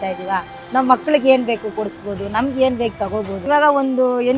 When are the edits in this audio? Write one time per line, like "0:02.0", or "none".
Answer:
0:03.4